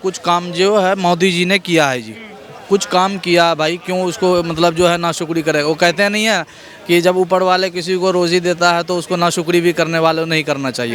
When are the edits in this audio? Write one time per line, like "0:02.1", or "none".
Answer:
none